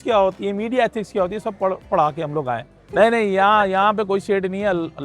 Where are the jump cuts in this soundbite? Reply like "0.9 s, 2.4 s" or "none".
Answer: 2.8 s